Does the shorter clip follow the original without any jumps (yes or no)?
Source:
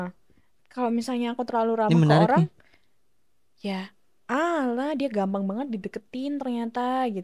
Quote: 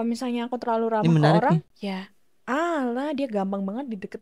no